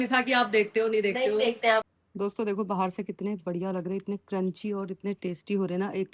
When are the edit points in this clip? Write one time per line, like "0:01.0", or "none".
0:01.8